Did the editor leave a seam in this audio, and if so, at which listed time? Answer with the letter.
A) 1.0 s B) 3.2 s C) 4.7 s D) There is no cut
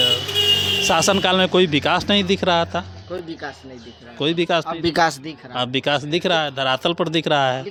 D